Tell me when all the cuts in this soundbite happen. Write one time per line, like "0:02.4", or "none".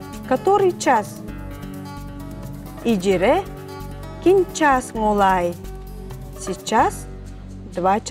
none